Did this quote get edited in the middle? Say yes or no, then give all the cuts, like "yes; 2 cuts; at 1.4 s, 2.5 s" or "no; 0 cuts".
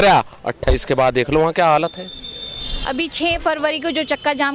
no; 0 cuts